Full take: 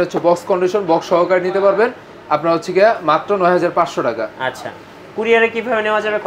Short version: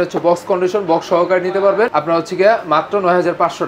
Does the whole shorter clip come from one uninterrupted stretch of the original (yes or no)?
no